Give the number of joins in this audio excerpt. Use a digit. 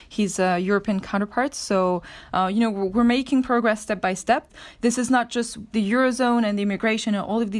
0